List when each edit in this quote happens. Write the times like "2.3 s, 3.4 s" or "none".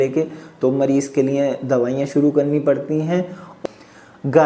3.5 s